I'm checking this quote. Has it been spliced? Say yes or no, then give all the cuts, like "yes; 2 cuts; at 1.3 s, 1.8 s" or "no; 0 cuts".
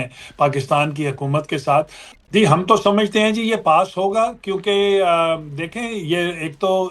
yes; 1 cut; at 2.0 s